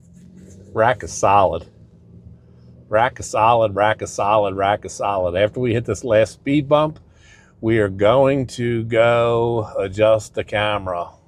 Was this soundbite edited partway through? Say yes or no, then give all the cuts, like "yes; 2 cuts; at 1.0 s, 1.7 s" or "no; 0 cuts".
no; 0 cuts